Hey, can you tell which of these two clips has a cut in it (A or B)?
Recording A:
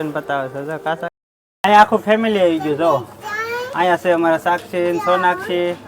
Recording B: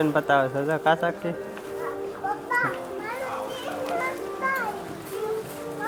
A